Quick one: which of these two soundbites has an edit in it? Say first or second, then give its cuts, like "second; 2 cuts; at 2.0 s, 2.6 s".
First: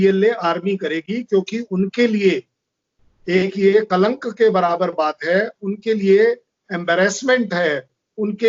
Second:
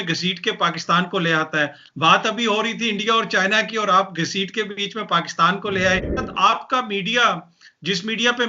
second; 1 cut; at 6.3 s